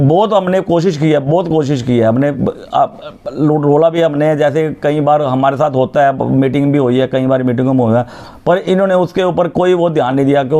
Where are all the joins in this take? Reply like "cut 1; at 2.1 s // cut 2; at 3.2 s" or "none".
none